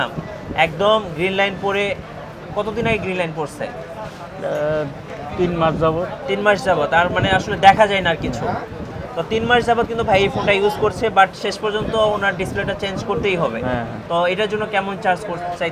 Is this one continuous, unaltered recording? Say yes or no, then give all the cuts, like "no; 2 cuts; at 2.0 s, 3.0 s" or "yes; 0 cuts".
yes; 0 cuts